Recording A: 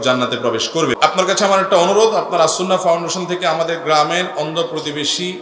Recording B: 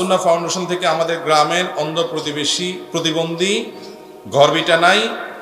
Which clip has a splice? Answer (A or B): A